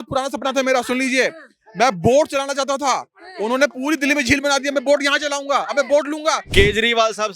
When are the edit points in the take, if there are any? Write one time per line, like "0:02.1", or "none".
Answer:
0:06.4